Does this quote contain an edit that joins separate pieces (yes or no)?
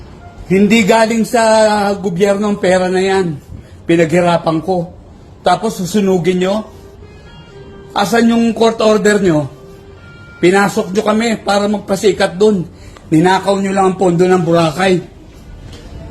yes